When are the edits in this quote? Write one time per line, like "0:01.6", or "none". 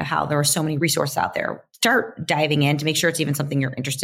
0:00.8
0:01.7

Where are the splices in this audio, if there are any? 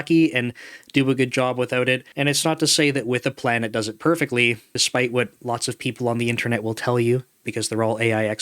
0:02.1
0:04.7

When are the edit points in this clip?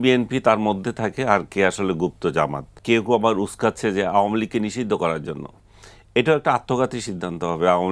0:02.7

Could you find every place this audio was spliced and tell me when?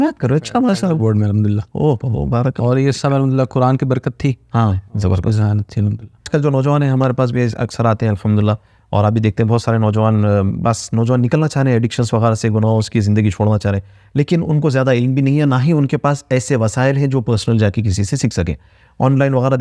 0:06.3

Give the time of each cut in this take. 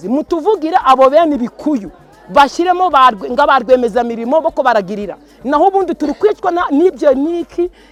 none

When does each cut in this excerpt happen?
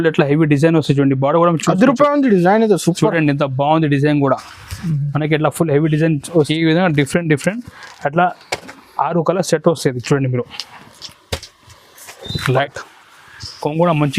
0:06.5
0:12.6

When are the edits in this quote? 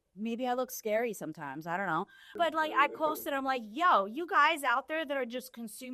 0:02.2

